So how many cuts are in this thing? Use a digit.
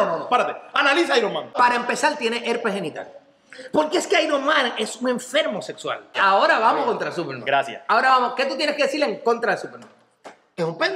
2